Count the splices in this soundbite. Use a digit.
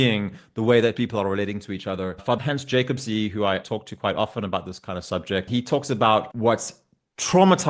4